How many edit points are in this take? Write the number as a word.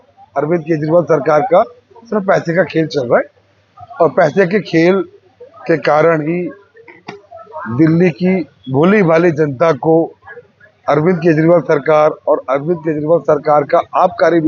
zero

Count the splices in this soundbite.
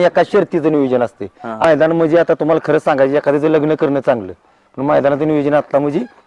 one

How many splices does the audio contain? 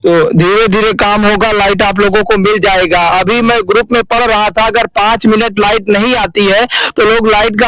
zero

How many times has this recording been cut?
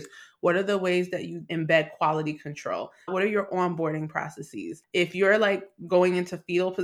one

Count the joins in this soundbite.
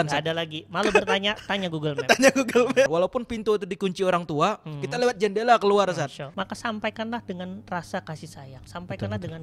two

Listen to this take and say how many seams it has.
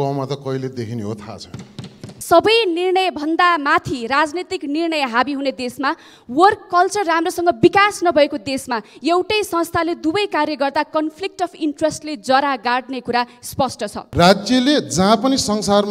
two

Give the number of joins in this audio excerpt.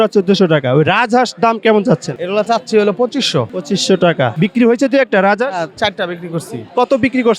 three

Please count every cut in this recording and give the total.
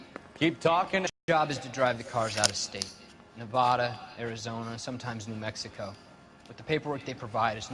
one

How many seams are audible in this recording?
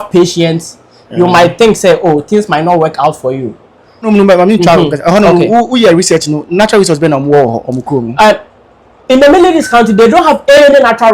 one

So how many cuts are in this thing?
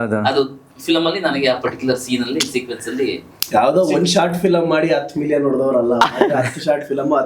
one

